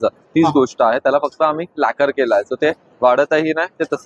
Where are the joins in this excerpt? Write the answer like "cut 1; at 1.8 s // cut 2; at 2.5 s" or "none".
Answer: none